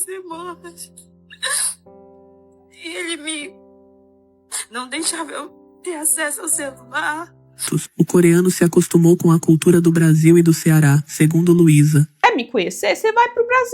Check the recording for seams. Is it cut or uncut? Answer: cut